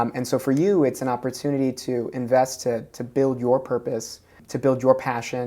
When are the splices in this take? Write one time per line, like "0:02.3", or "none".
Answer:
0:04.4